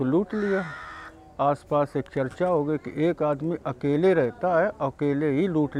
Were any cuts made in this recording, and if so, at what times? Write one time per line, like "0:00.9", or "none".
none